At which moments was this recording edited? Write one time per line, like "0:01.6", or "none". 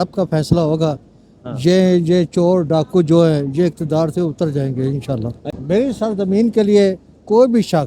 0:05.5